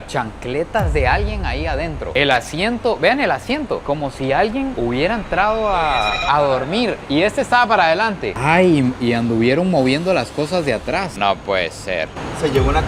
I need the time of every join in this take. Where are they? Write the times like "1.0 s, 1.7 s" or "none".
6.2 s, 8.3 s, 11.1 s